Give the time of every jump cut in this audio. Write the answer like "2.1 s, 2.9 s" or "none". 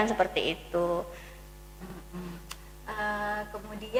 none